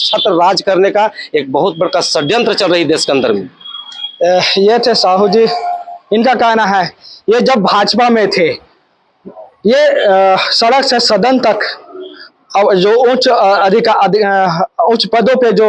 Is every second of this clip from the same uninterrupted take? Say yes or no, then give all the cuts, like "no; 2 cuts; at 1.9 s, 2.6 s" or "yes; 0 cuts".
yes; 0 cuts